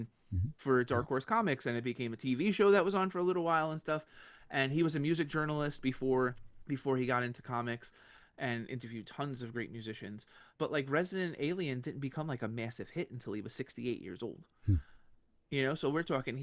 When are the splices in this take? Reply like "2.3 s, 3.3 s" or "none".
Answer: none